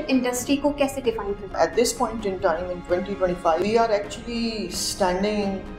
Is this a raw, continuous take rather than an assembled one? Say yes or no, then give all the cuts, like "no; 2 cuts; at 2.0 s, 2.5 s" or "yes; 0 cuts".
no; 2 cuts; at 1.5 s, 3.6 s